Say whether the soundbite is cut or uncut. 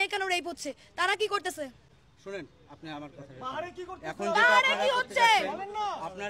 uncut